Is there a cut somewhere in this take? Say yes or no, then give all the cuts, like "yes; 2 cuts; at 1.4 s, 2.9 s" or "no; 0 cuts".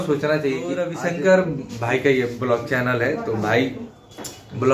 yes; 1 cut; at 0.9 s